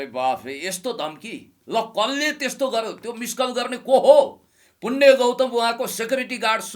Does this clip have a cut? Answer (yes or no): no